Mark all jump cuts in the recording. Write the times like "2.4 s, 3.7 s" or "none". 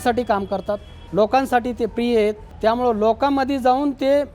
0.9 s, 2.5 s